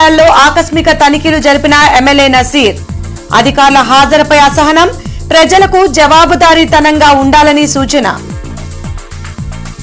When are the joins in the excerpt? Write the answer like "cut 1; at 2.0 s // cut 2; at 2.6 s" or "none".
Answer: none